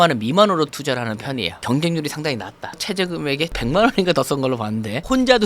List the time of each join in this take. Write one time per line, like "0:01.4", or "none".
0:01.6
0:02.8